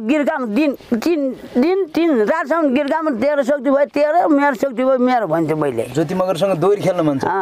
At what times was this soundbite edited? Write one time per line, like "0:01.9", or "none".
none